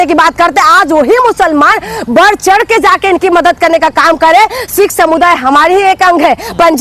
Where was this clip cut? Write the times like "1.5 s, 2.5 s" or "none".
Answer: none